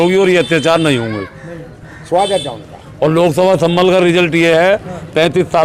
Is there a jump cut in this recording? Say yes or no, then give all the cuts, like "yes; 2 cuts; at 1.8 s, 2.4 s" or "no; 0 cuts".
no; 0 cuts